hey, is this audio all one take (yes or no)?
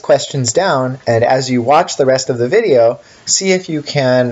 no